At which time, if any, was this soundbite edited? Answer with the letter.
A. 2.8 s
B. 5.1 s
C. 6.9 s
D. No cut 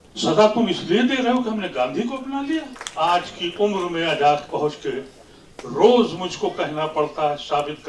A